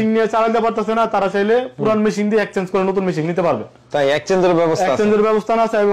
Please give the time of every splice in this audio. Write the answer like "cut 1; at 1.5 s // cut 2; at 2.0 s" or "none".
none